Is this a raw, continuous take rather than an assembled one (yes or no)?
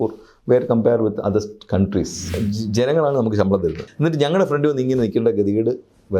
no